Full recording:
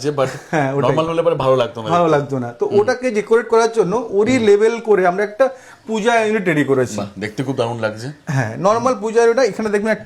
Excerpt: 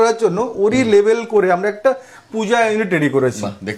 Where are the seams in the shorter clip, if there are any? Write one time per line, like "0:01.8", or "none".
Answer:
none